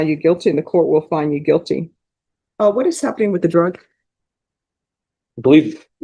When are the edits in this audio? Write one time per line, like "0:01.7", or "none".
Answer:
0:01.1